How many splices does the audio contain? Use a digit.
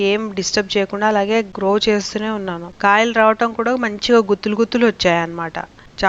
2